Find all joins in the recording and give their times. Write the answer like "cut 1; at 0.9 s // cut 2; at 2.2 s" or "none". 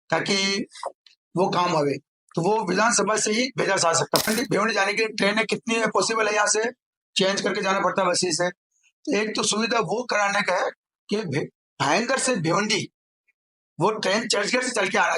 cut 1; at 4.3 s